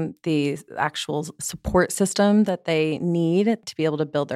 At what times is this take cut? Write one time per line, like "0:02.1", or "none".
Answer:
0:01.4
0:03.6